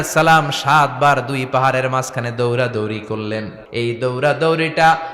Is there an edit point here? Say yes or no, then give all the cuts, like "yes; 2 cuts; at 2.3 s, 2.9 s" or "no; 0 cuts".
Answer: yes; 1 cut; at 3.6 s